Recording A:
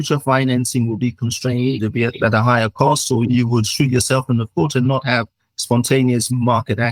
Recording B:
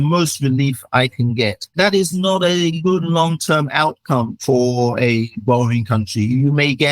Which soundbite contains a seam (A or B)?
B